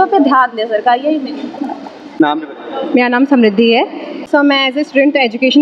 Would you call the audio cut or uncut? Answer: uncut